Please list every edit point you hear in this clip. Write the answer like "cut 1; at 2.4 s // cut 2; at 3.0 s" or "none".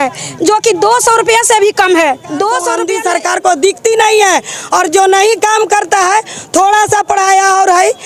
cut 1; at 2.8 s